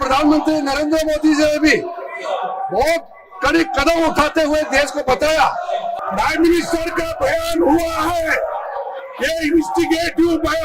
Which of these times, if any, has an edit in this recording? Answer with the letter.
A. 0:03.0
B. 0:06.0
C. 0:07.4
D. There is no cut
B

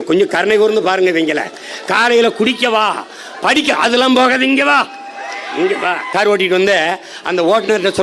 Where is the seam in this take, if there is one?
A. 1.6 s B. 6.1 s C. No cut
B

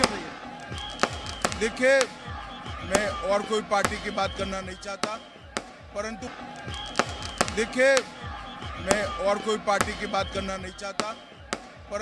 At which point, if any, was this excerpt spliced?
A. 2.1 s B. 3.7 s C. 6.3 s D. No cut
C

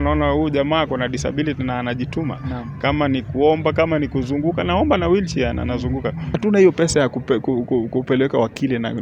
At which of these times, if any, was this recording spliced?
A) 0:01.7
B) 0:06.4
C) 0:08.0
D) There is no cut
B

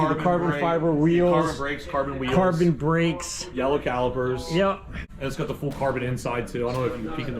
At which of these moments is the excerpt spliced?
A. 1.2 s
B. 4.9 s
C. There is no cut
B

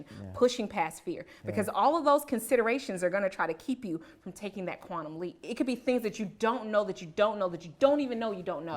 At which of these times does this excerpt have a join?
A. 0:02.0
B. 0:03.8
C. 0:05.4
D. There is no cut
C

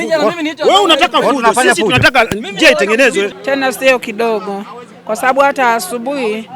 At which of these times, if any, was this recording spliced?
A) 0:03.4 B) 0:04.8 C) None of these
A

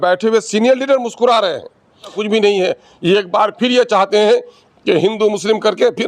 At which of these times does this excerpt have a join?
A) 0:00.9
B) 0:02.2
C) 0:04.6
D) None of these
B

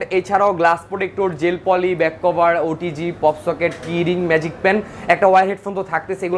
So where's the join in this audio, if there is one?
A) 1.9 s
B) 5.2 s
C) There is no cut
C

